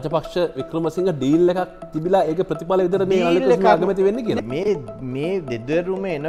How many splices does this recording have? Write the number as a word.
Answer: one